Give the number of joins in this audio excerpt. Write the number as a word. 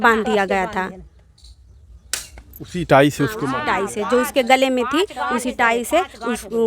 zero